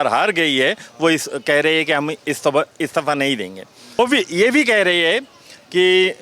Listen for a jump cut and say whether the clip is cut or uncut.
cut